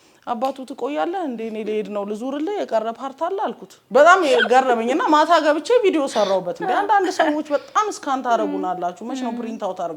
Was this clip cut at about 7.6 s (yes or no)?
no